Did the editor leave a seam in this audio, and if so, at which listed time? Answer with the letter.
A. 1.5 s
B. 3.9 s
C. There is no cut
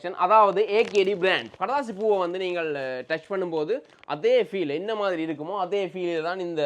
A